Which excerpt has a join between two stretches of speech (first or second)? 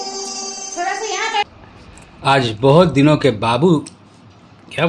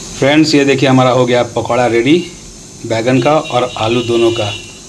first